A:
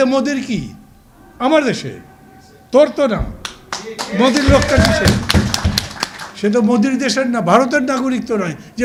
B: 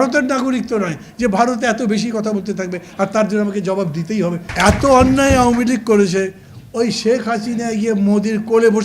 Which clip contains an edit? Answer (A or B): B